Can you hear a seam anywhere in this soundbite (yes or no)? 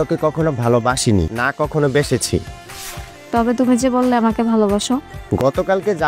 no